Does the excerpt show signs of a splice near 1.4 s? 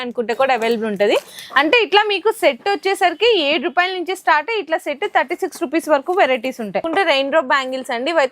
no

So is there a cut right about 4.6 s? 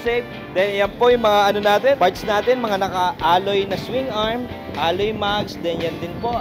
no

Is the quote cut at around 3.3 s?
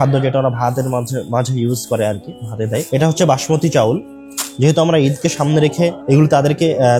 no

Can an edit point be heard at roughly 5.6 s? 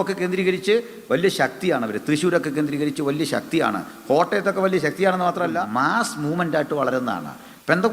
yes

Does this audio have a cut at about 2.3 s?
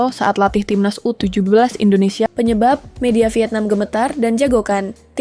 yes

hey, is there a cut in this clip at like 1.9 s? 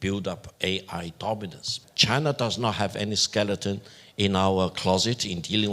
yes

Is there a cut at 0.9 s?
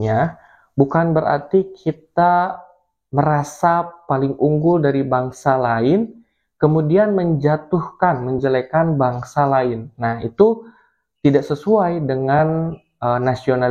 no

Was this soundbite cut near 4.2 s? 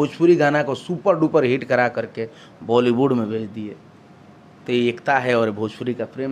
no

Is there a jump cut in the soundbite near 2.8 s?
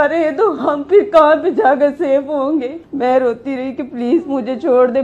yes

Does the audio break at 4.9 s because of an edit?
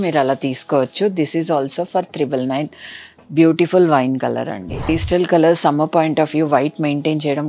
yes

